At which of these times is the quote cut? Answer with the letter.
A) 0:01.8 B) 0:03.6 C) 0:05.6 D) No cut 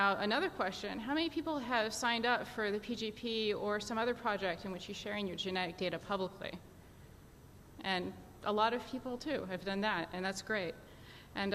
D